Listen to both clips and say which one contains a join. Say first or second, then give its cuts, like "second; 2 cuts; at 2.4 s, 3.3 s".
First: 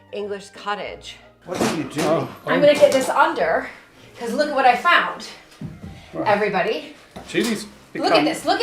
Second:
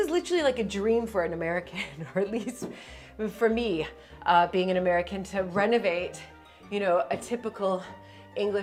first; 1 cut; at 1.3 s